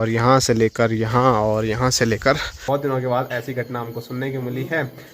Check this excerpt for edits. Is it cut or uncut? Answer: cut